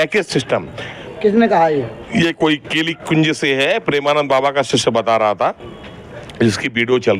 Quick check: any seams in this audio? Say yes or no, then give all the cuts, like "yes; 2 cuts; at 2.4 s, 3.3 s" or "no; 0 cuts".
yes; 1 cut; at 1.0 s